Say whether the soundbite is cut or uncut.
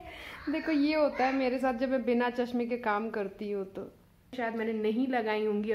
cut